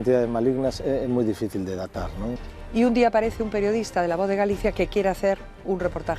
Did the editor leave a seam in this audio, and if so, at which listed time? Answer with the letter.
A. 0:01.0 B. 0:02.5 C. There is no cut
B